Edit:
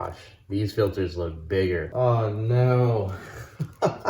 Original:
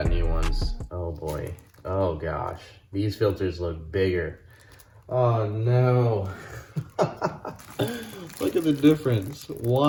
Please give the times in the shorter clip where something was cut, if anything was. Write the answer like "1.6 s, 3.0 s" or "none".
1.9 s

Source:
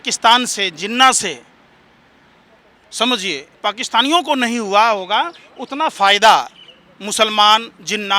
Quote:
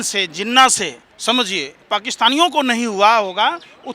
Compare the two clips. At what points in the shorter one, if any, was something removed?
1.1 s

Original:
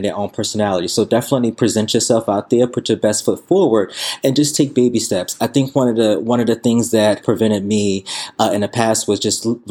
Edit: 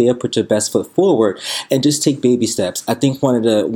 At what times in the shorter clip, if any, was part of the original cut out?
none

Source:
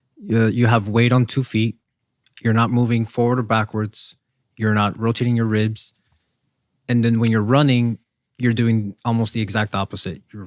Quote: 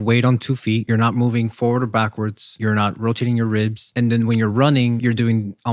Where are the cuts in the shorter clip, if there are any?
0.8 s, 2.4 s, 3.8 s, 5.0 s

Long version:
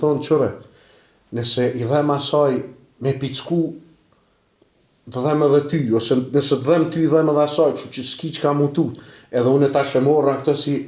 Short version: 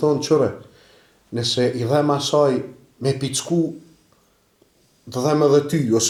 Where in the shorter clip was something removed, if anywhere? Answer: none

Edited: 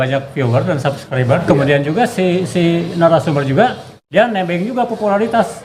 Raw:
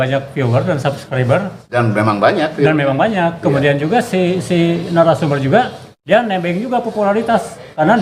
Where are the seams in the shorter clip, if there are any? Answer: 1.4 s

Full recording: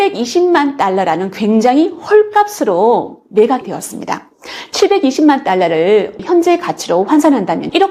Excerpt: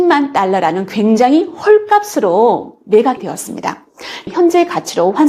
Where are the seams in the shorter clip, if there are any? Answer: 4.2 s

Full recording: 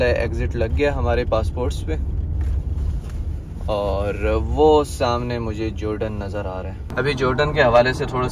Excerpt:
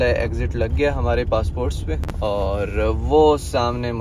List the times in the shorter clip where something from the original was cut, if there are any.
2.0 s

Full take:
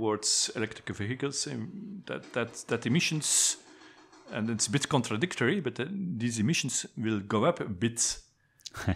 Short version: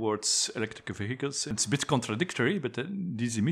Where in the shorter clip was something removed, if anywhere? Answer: 1.5 s

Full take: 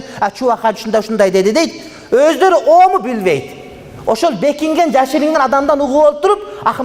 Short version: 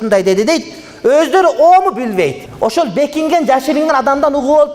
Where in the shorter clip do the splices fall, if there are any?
2.4 s

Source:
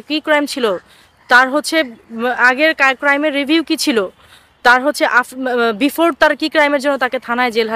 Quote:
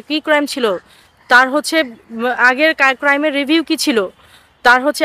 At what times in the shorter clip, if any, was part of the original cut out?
none

